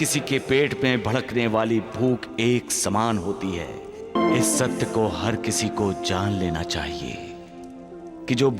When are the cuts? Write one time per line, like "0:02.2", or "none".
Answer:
0:04.1

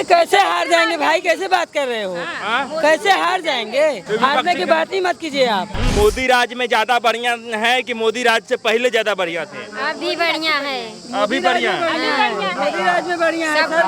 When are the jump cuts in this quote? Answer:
0:04.0
0:05.9

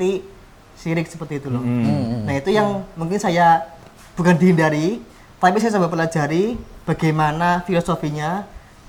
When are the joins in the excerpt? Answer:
none

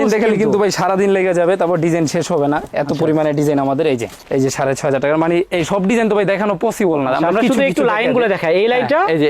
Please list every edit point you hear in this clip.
0:04.2

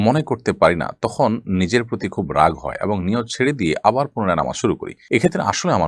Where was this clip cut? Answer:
none

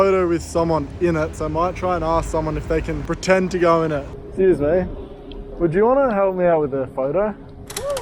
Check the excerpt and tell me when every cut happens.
0:01.4
0:04.2

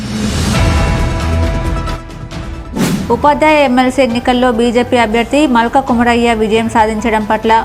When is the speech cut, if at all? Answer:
0:00.9

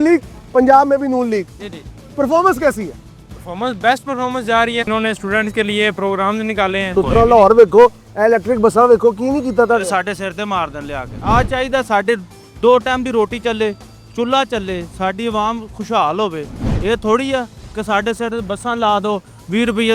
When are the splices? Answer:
0:04.9
0:06.8
0:11.1

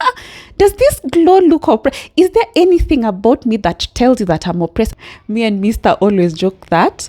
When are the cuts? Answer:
0:04.9

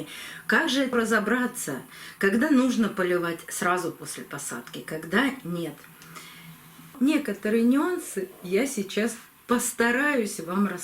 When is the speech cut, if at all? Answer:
0:00.9
0:06.9

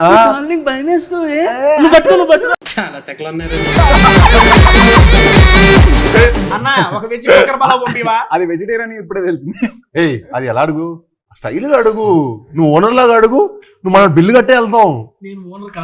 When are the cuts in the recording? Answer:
0:02.7
0:06.5

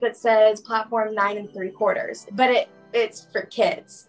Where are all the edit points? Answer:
0:02.2

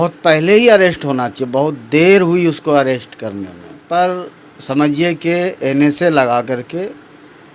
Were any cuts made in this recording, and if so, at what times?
0:03.8

